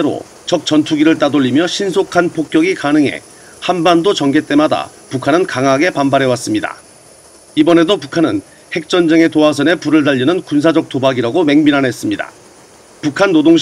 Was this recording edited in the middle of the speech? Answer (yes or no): yes